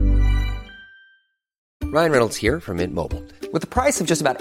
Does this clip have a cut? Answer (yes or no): yes